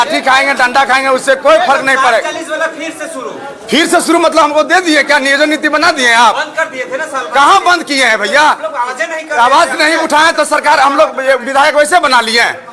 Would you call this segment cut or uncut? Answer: uncut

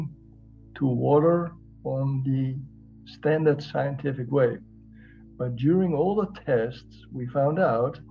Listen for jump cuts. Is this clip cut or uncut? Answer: uncut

